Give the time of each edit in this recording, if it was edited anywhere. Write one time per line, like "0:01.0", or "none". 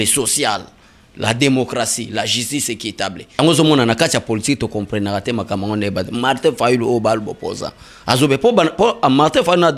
0:03.4